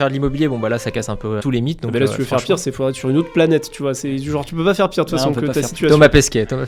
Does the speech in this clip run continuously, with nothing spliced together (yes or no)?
yes